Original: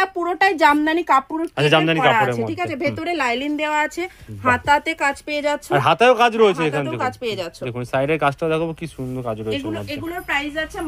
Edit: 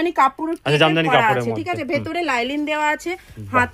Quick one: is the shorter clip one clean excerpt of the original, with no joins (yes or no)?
yes